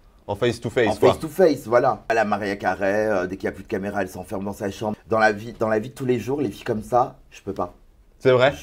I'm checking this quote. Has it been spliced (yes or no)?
yes